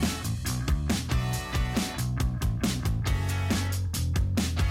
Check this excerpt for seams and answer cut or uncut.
cut